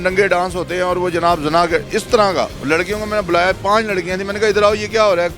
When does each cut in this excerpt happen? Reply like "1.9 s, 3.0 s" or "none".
2.6 s